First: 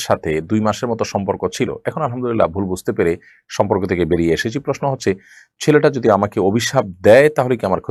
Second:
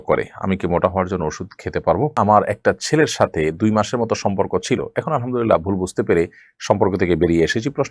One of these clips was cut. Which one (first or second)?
second